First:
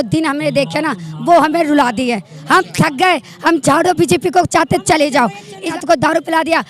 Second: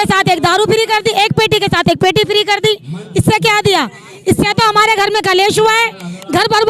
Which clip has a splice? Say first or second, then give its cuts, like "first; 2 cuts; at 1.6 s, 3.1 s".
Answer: first; 1 cut; at 5.7 s